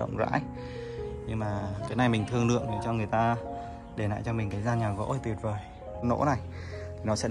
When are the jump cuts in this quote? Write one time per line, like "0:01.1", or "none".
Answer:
0:05.9